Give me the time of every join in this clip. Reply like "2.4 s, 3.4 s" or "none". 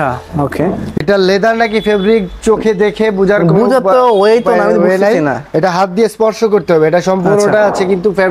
1.0 s